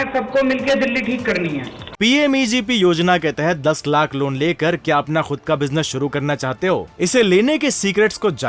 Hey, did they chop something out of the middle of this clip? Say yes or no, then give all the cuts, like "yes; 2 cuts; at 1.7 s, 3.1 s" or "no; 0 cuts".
yes; 1 cut; at 1.8 s